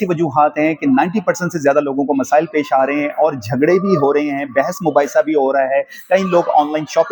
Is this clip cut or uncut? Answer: uncut